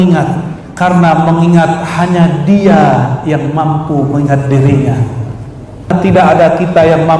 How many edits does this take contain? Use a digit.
1